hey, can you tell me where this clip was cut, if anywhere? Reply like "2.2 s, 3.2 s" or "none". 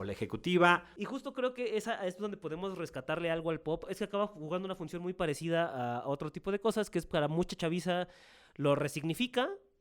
0.9 s, 3.9 s